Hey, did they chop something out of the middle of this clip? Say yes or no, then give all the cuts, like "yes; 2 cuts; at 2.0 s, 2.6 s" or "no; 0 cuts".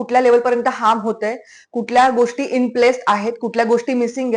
no; 0 cuts